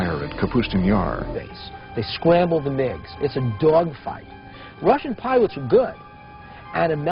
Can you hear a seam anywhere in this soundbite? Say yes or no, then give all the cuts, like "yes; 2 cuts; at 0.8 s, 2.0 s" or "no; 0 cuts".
no; 0 cuts